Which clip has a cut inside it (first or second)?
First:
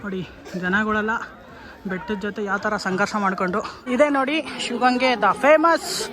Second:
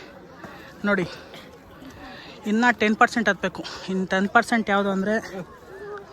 first